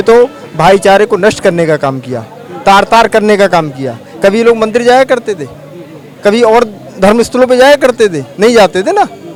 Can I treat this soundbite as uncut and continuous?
yes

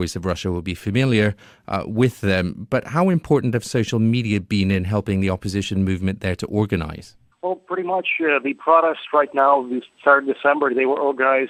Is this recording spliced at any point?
no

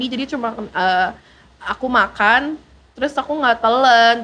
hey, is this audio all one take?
yes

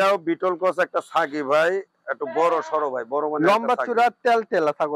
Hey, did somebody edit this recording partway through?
no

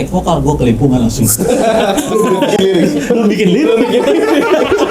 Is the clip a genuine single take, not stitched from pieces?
yes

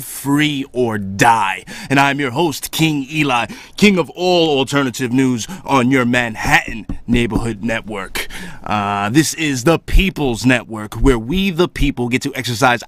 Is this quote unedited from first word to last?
yes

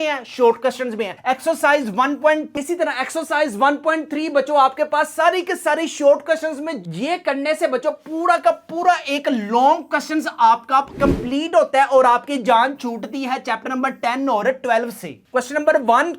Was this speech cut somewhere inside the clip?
yes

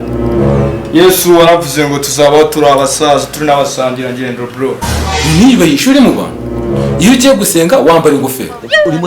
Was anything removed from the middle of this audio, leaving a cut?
yes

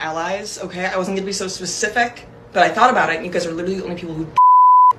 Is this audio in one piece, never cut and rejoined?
yes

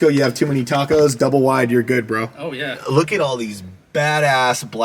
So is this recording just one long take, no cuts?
no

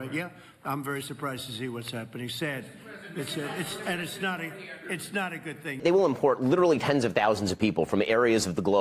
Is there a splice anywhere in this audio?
yes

